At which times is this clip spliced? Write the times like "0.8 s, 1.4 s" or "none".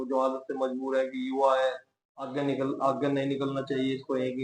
none